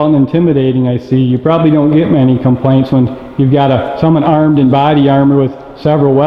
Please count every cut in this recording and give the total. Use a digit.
0